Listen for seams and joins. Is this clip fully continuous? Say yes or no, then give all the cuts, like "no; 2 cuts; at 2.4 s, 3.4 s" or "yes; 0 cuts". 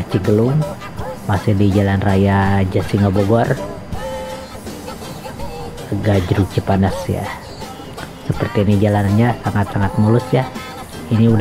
yes; 0 cuts